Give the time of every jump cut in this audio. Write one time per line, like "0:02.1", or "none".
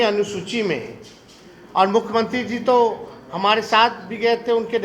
none